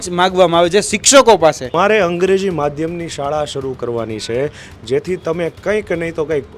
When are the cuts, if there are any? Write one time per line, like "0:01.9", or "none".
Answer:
0:01.7